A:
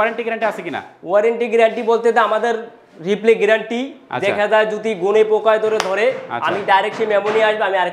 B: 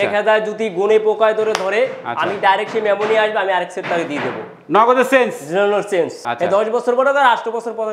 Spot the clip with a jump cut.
B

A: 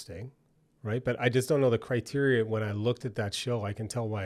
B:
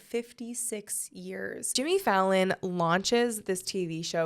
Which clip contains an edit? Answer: B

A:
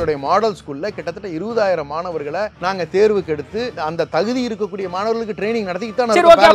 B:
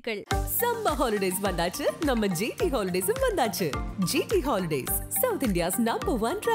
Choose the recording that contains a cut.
A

